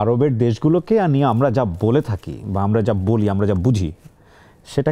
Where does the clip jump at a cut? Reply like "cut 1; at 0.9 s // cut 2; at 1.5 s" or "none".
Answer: none